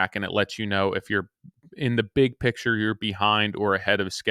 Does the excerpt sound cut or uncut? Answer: uncut